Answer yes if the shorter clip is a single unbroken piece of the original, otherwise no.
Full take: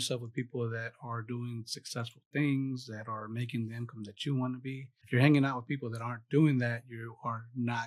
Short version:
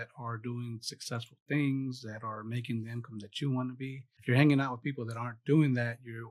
yes